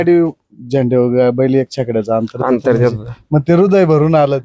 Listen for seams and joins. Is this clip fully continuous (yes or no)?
yes